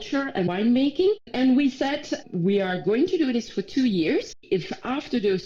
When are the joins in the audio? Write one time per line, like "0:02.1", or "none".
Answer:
0:04.4